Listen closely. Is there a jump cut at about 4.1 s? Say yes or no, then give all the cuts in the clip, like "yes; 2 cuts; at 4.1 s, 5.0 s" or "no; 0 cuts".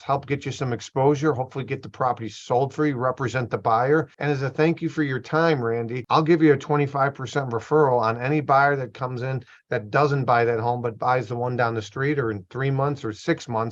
yes; 2 cuts; at 4.1 s, 6.0 s